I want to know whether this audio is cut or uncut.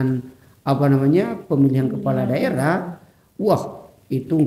uncut